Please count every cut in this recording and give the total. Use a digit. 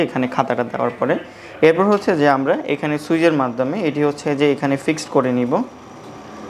0